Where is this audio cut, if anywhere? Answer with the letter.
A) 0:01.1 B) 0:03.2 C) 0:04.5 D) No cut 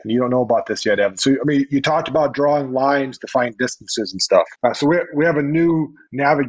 C